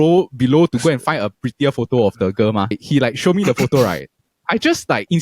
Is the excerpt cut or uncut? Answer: cut